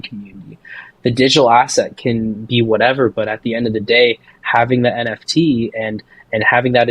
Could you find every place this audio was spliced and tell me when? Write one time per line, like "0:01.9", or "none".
none